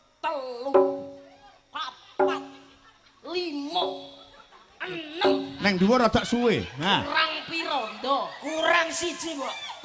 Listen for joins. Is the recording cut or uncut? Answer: uncut